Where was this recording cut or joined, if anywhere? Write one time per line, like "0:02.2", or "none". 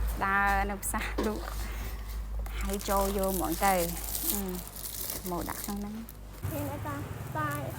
0:06.4